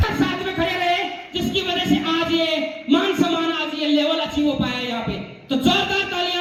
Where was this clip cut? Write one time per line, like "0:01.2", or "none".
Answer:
none

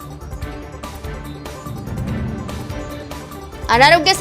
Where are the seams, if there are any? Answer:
none

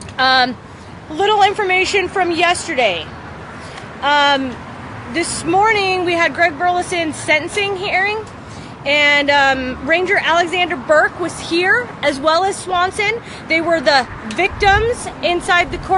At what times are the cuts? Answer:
0:14.4

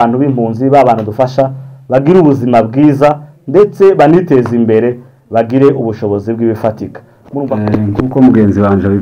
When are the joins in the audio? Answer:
0:07.4

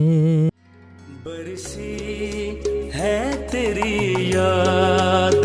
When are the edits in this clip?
none

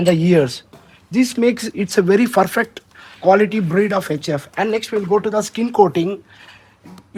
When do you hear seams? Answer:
none

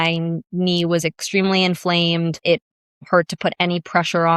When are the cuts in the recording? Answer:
none

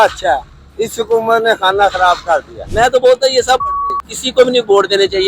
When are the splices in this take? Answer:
0:02.6
0:03.6

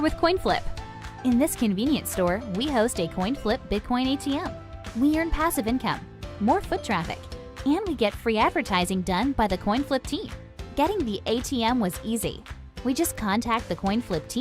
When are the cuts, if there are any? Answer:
0:13.1

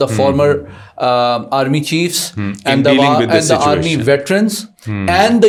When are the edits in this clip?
none

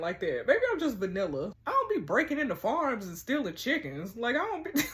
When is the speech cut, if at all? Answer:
0:01.5

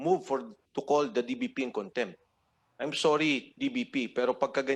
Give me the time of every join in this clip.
none

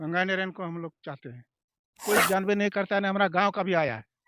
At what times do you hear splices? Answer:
0:01.9

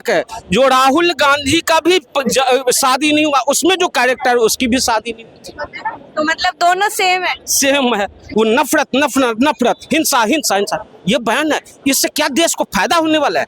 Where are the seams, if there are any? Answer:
0:08.2

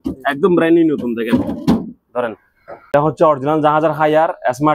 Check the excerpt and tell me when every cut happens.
0:02.9

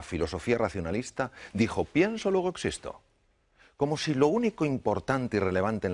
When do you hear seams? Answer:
0:04.2

